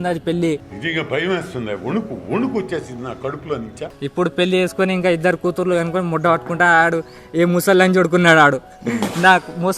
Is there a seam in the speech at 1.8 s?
no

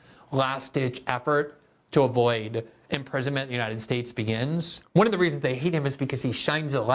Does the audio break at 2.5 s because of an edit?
no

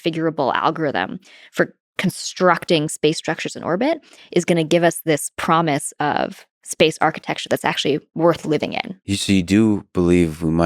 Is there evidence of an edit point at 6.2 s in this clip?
no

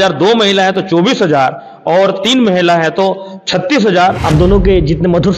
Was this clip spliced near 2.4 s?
no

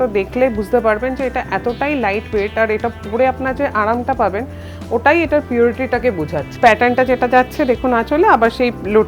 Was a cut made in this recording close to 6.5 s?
yes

